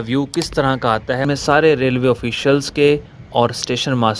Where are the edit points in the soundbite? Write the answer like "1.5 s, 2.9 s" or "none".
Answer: 1.2 s